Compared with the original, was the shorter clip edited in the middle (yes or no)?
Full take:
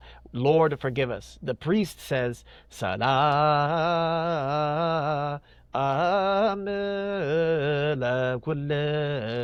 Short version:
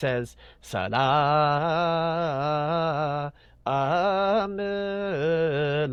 no